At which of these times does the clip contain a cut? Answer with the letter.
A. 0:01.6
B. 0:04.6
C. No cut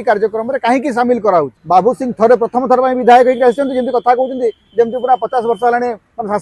A